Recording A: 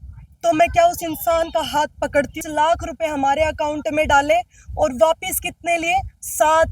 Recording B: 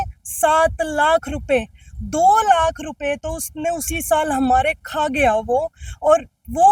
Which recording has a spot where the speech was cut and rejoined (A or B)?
A